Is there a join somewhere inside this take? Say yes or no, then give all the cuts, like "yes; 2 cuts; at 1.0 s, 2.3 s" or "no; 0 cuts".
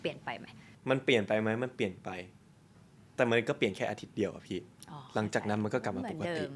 no; 0 cuts